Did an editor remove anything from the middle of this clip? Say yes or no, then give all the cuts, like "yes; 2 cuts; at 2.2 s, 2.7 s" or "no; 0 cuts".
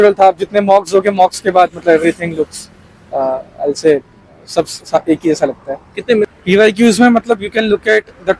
yes; 1 cut; at 6.2 s